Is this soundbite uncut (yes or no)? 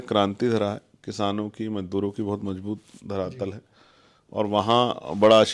yes